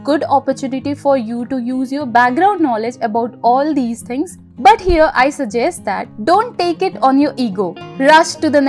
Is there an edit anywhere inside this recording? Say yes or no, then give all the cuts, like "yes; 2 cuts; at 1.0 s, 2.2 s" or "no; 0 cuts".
yes; 2 cuts; at 6.1 s, 7.8 s